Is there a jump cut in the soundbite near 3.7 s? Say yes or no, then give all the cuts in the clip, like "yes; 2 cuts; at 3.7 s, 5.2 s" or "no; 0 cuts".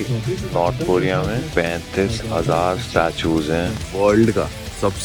yes; 1 cut; at 3.7 s